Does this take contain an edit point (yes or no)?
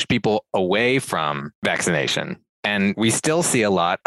yes